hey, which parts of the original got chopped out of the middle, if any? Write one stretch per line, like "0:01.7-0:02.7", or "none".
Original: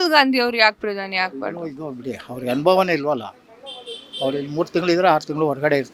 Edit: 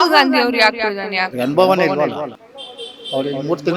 0:01.3-0:02.4